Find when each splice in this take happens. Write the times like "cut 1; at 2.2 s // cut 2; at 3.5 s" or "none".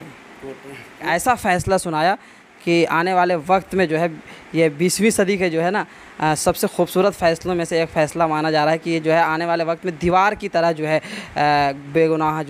cut 1; at 1.0 s